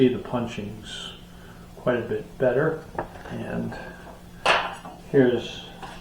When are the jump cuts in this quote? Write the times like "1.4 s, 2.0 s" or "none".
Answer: none